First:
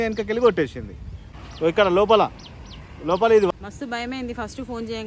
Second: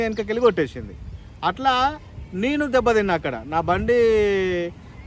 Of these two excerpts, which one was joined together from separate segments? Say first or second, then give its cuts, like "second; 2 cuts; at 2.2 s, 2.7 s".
first; 2 cuts; at 1.3 s, 3.5 s